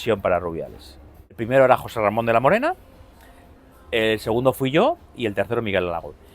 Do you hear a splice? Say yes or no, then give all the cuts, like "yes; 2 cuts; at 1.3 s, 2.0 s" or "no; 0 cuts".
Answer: yes; 1 cut; at 1.4 s